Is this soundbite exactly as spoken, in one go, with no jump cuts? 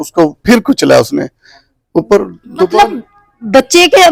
yes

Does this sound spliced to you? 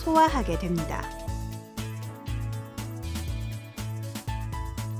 yes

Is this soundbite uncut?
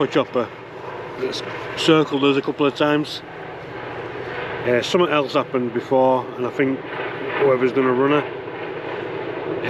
yes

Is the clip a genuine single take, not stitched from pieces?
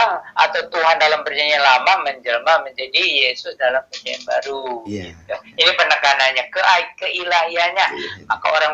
yes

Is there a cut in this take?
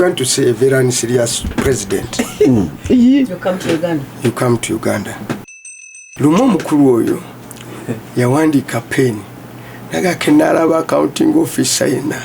yes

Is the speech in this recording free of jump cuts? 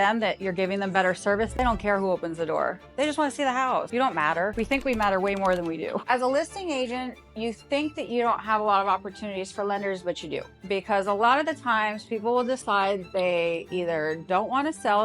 no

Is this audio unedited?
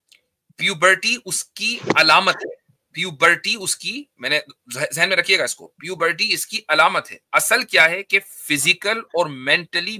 yes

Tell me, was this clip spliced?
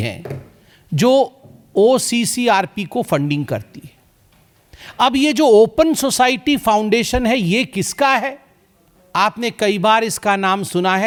no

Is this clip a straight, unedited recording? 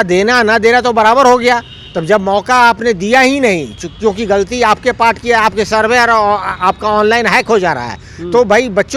yes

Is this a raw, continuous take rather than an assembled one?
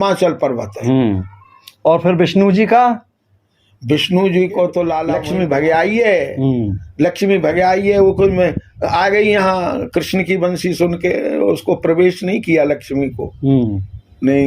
no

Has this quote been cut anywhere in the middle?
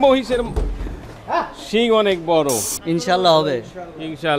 yes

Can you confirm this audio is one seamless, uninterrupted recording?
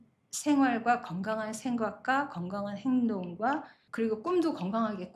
no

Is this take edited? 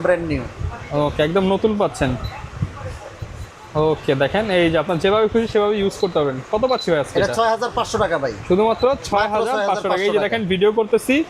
no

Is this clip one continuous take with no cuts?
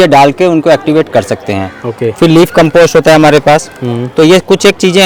yes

